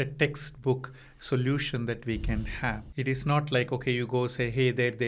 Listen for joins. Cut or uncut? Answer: cut